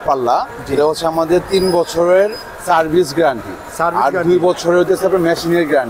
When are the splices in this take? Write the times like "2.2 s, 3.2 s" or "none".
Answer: none